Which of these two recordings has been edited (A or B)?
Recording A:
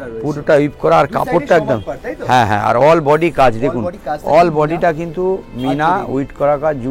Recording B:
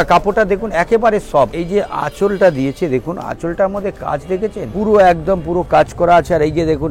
B